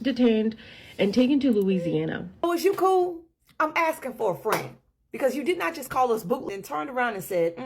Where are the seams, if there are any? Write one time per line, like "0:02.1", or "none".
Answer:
0:02.5
0:06.4